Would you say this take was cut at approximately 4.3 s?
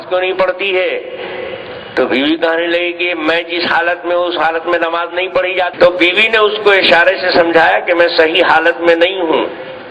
no; 1 cut; at 5.7 s

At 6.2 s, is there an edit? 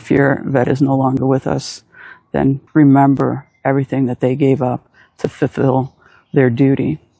no; 1 cut; at 2.6 s

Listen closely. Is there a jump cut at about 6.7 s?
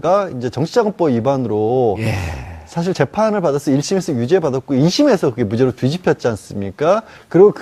yes; 1 cut; at 6.7 s

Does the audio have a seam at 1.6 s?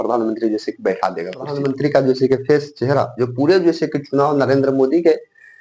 yes; 1 cut; at 1.6 s

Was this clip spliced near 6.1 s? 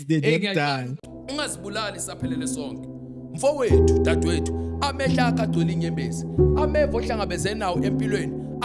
no; 1 cut; at 0.9 s

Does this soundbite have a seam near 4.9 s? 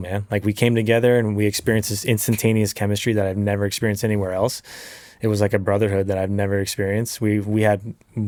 no; 0 cuts

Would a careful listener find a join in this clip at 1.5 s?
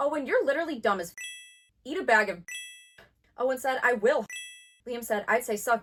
no; 0 cuts

